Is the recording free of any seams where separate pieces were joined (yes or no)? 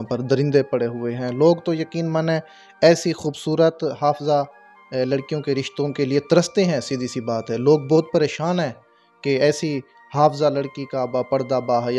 yes